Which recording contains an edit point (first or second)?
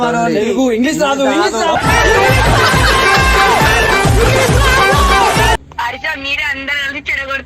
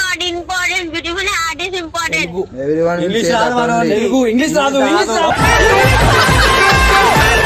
first